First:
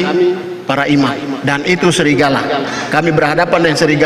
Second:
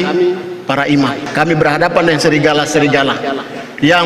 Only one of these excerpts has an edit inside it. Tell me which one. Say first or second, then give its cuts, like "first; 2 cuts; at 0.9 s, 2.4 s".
second; 1 cut; at 1.2 s